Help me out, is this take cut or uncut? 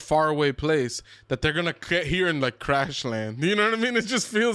uncut